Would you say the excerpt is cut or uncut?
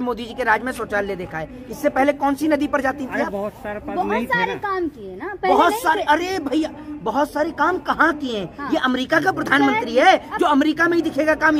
uncut